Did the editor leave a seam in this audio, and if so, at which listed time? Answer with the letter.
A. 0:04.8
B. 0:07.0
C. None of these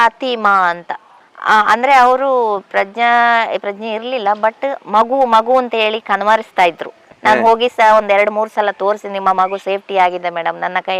B